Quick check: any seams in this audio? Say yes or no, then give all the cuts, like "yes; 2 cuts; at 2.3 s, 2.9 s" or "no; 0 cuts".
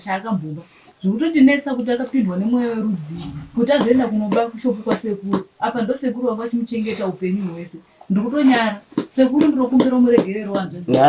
no; 0 cuts